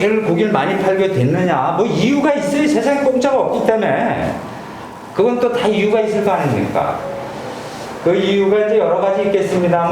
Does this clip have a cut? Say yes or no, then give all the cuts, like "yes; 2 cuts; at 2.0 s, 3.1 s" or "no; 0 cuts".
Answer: no; 0 cuts